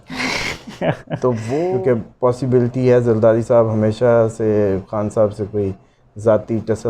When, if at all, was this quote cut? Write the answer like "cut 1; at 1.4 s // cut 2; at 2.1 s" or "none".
cut 1; at 1.6 s

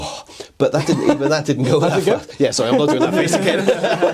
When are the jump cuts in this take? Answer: none

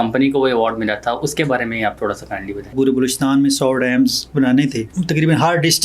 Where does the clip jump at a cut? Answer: cut 1; at 2.7 s // cut 2; at 4.9 s

